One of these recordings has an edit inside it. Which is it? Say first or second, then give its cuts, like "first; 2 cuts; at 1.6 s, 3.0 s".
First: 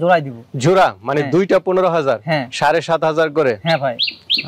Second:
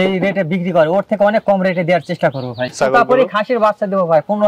second; 1 cut; at 2.7 s